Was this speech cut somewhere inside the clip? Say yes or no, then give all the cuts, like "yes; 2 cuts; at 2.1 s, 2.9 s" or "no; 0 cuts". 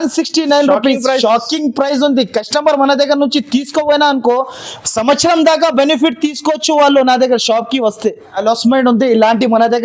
yes; 1 cut; at 8.4 s